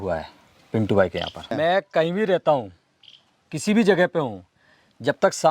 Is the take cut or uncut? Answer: cut